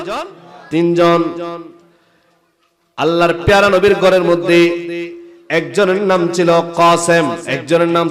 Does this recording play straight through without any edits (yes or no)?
yes